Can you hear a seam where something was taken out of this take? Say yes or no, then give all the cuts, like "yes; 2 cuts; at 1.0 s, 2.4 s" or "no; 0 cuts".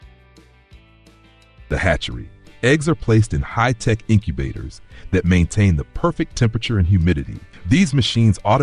yes; 1 cut; at 1.6 s